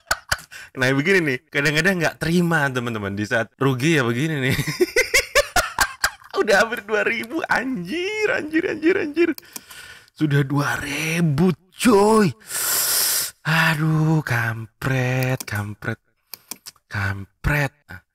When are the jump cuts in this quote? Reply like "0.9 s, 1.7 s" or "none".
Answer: none

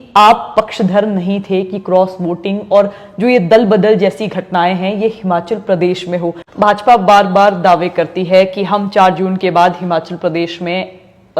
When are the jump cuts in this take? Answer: 6.4 s

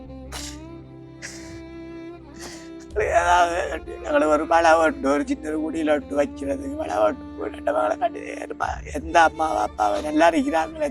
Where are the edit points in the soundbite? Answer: 2.8 s

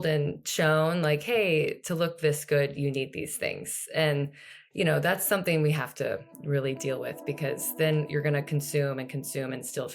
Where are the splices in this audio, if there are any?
8.1 s

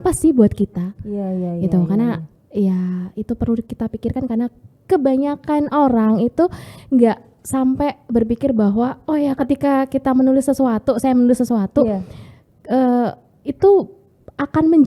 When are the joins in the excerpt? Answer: none

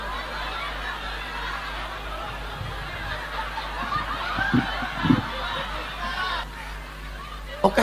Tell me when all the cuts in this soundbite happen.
6.4 s

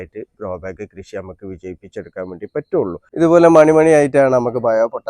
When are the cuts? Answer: 3.0 s

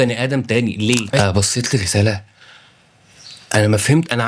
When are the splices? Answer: 1.2 s

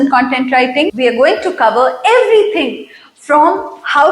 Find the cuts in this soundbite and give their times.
0.9 s

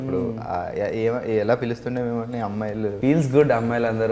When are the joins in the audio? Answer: 3.0 s

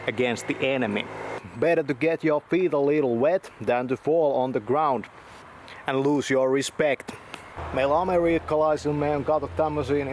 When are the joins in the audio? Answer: 1.4 s, 7.5 s

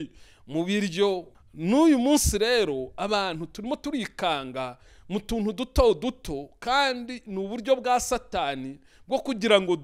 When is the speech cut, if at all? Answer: 1.3 s

